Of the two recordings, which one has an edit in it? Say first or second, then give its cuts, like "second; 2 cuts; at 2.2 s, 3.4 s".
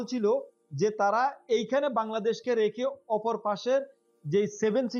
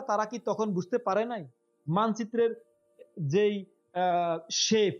second; 1 cut; at 1.7 s